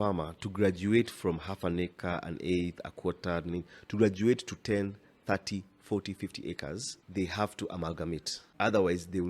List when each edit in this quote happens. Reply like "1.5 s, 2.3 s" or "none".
7.0 s, 8.4 s